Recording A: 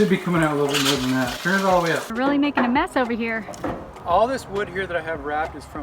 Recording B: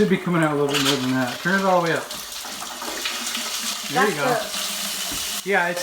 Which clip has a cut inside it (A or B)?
A